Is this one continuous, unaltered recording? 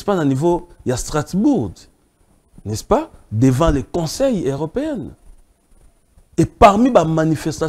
yes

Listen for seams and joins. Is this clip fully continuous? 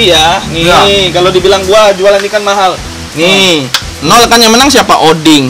yes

